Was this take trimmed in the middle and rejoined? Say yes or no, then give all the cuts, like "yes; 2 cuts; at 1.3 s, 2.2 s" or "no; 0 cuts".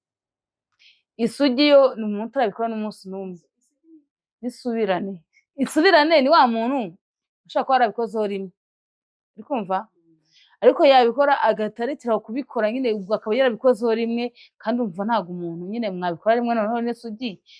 no; 0 cuts